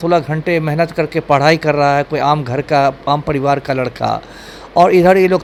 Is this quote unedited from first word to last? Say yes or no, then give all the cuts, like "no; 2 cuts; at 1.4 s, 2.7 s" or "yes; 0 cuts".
yes; 0 cuts